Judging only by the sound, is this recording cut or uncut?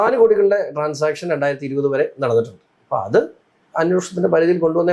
uncut